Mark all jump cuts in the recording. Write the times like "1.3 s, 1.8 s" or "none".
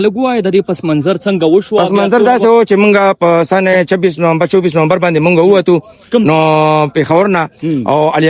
none